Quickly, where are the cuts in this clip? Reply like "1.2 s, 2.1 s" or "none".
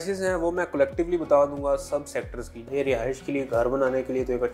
2.7 s